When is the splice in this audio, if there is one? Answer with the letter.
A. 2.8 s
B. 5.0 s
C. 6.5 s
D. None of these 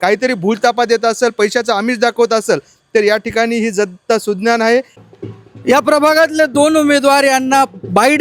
B